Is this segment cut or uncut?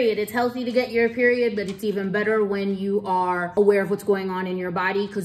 cut